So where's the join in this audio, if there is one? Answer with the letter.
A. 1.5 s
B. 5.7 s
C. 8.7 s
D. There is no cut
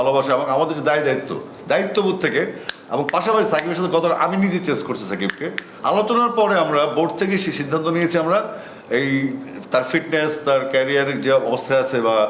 B